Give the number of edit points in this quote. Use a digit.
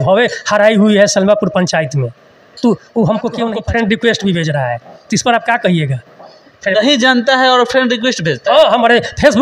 1